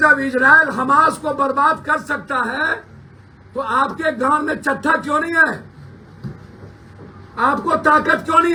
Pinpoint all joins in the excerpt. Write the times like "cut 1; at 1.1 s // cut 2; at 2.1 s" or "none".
none